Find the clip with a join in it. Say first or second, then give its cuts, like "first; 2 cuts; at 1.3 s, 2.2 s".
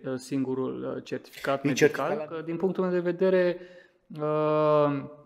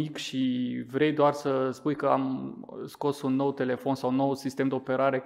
first; 1 cut; at 2.4 s